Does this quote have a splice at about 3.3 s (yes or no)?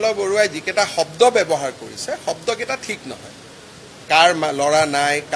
no